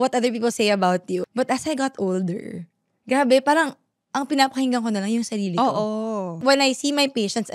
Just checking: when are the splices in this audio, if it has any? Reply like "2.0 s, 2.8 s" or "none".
1.2 s, 6.4 s